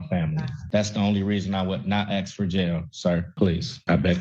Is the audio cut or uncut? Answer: cut